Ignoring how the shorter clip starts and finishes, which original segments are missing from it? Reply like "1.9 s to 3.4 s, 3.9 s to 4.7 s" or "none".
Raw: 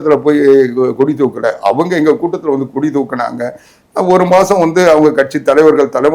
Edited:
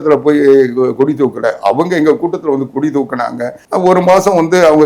3.6 s to 3.8 s